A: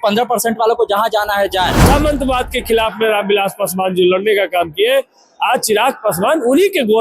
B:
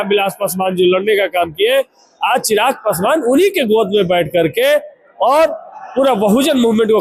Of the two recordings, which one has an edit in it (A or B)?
A